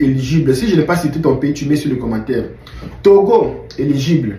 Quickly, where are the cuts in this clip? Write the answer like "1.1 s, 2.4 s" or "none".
none